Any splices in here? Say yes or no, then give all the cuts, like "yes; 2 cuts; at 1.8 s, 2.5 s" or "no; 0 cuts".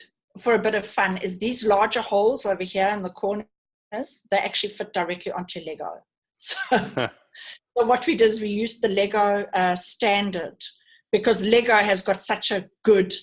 no; 0 cuts